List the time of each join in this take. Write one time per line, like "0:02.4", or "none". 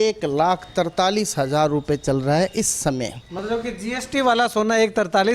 none